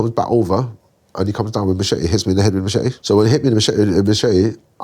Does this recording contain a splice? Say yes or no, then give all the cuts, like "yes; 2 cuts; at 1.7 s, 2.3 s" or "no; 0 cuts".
yes; 1 cut; at 3.0 s